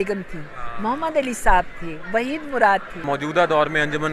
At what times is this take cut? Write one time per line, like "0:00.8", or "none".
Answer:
0:03.0